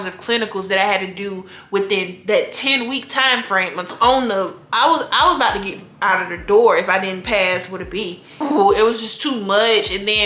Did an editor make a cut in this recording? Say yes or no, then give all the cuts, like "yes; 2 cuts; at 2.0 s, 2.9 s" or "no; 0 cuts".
yes; 2 cuts; at 3.9 s, 8.4 s